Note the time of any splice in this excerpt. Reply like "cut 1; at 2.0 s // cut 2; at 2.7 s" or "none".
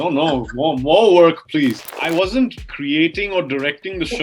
cut 1; at 1.9 s // cut 2; at 2.7 s